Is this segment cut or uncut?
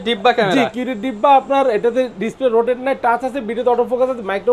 uncut